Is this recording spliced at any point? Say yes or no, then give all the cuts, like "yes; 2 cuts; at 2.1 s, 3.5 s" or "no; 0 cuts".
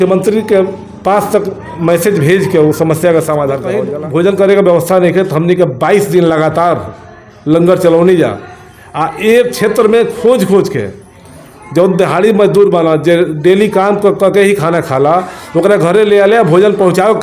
yes; 1 cut; at 3.6 s